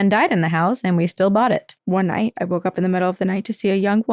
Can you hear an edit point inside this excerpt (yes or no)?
yes